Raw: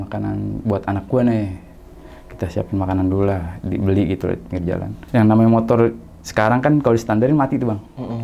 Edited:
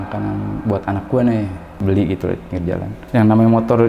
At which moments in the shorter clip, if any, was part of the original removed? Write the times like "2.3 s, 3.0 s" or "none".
1.8 s